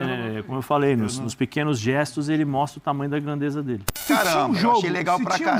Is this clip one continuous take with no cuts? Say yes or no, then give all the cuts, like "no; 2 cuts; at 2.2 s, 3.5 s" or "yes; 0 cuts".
no; 1 cut; at 4.0 s